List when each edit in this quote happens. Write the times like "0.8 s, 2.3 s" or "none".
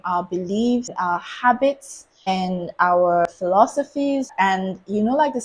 0.9 s, 2.3 s, 3.3 s, 4.3 s